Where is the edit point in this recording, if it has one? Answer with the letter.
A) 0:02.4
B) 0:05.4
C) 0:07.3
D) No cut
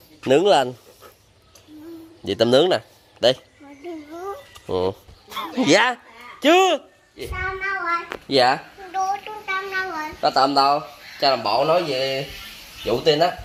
C